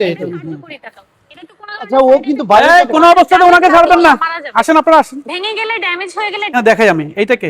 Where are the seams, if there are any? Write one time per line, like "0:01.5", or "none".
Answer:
0:06.5